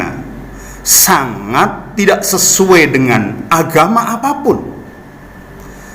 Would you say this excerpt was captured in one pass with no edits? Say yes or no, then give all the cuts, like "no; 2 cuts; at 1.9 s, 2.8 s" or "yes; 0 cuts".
yes; 0 cuts